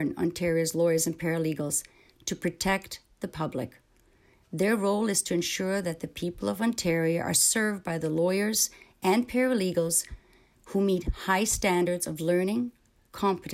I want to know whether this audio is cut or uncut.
uncut